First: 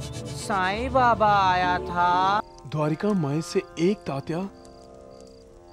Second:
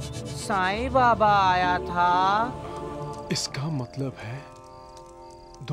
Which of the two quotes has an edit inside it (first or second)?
first